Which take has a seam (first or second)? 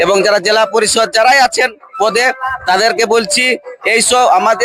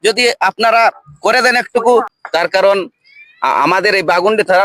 second